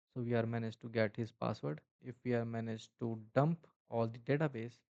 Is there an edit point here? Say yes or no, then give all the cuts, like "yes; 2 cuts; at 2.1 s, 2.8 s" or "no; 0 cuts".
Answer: yes; 1 cut; at 2.0 s